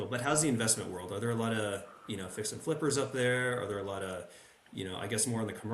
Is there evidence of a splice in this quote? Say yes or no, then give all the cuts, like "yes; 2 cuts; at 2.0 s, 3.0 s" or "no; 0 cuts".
no; 0 cuts